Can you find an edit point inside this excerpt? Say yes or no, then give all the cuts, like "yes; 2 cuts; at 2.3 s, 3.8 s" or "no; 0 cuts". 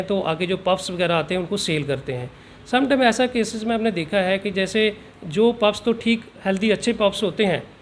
no; 0 cuts